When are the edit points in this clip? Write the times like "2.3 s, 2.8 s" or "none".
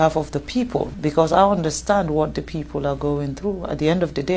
0.9 s